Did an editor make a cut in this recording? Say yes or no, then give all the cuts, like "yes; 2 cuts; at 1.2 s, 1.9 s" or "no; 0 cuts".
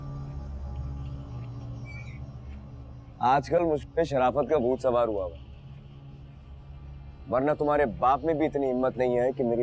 no; 0 cuts